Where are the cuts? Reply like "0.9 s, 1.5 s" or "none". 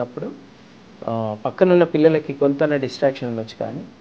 none